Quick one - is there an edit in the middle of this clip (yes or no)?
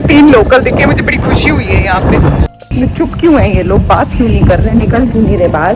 yes